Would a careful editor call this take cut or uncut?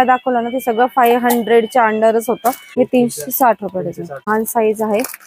cut